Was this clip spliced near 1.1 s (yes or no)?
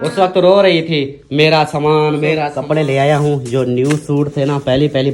no